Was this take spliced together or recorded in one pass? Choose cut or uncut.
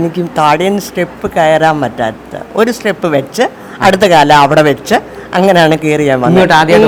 uncut